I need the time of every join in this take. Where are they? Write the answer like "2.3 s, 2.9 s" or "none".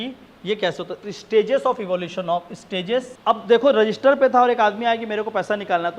3.1 s